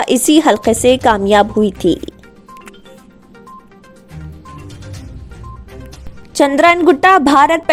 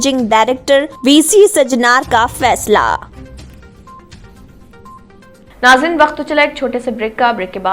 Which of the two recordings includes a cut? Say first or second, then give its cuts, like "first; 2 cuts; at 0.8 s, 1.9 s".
second; 1 cut; at 5.5 s